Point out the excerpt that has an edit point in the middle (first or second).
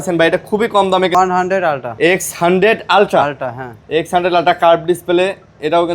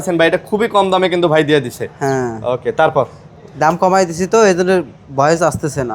first